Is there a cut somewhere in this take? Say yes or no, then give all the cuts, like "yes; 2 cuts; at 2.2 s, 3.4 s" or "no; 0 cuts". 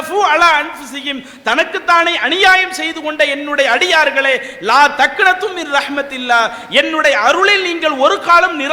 no; 0 cuts